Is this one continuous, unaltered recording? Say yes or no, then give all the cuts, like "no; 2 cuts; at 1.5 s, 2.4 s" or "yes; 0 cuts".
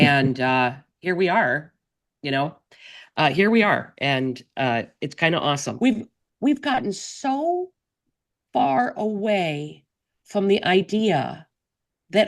no; 1 cut; at 5.7 s